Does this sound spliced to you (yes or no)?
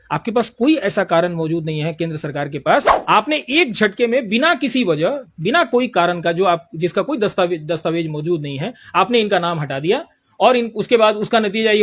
yes